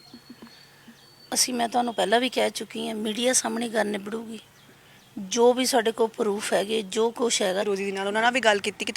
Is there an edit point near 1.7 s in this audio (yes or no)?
no